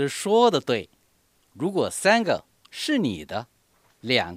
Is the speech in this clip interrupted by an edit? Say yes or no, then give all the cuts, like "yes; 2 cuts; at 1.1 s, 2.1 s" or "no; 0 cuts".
no; 0 cuts